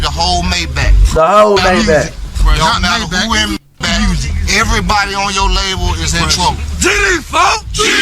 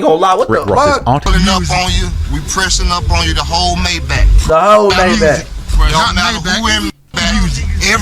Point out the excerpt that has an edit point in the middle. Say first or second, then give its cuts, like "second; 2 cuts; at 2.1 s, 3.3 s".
second; 1 cut; at 1.3 s